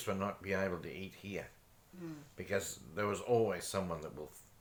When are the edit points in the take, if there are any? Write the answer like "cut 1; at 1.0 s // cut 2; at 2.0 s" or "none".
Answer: none